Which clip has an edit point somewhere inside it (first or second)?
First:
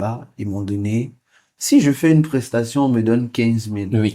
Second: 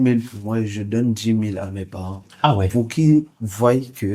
first